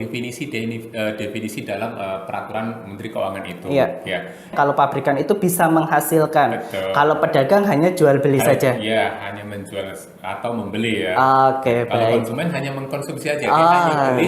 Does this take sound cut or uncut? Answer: cut